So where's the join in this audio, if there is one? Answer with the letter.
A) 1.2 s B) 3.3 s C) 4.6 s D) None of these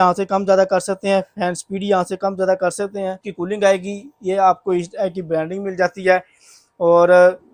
B